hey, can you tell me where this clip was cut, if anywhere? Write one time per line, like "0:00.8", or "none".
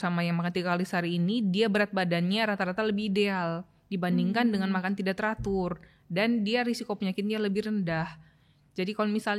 none